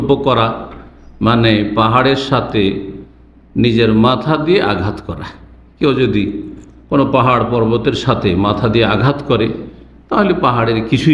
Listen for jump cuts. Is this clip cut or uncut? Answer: uncut